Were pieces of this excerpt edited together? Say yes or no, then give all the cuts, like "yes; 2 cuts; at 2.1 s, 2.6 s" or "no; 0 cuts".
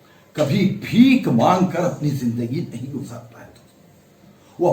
no; 0 cuts